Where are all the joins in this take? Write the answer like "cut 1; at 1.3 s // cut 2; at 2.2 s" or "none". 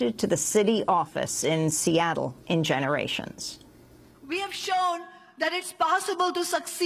cut 1; at 1.4 s